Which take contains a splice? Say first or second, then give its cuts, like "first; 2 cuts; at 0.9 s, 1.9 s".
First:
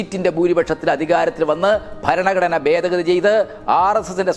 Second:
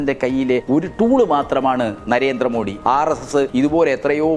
second; 3 cuts; at 0.8 s, 2.7 s, 3.5 s